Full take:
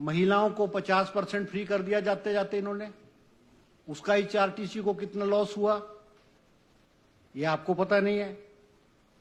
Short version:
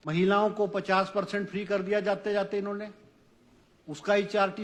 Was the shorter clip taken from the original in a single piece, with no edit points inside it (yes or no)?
yes